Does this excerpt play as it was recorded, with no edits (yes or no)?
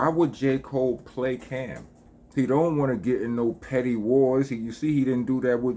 no